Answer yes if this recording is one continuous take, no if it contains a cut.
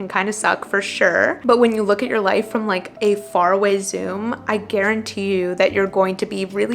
no